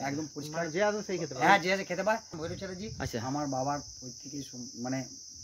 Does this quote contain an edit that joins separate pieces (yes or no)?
yes